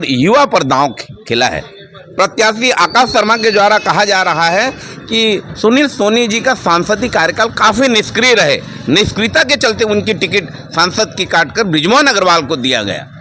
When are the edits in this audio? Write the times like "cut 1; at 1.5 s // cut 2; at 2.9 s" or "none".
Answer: none

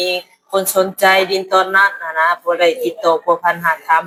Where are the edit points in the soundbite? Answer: none

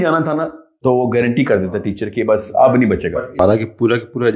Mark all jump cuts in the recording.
cut 1; at 3.4 s

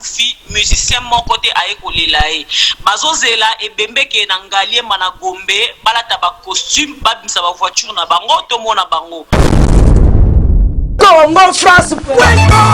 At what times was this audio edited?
cut 1; at 9.2 s

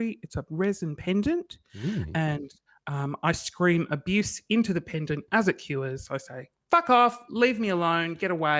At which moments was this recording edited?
none

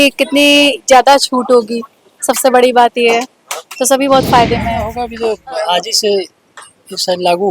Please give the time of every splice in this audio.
cut 1; at 5.0 s

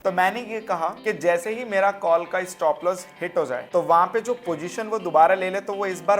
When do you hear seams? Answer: cut 1; at 1.0 s // cut 2; at 3.6 s

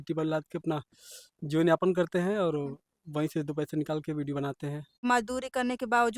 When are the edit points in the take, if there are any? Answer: cut 1; at 5.0 s

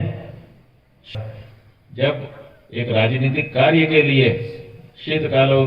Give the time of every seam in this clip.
cut 1; at 1.1 s

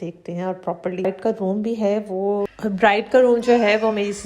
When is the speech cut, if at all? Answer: cut 1; at 1.0 s

